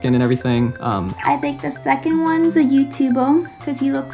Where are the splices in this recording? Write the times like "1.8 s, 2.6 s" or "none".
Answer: 1.1 s

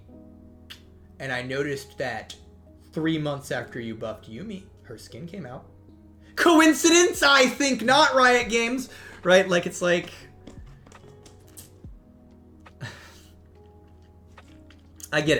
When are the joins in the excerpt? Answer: none

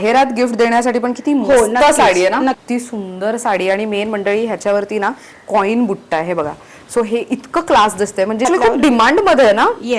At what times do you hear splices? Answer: 2.6 s, 8.4 s

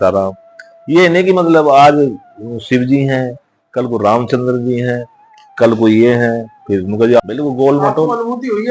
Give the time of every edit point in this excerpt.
7.2 s

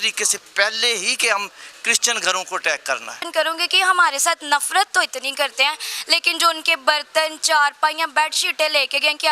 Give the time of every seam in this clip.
3.2 s

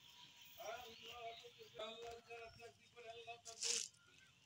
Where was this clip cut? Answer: 1.8 s

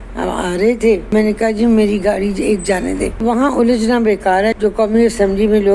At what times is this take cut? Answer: 1.1 s, 3.2 s, 4.5 s

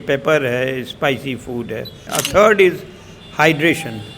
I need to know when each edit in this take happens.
2.1 s

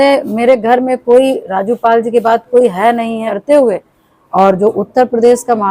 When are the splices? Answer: 3.3 s

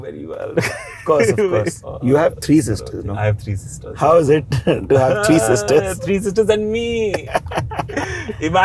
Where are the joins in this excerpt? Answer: 1.9 s

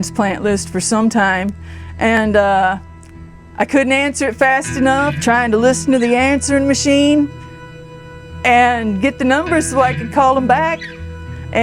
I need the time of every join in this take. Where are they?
5.2 s

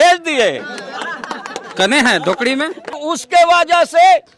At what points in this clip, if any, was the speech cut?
3.1 s

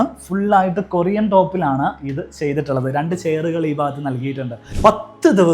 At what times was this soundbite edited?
4.6 s

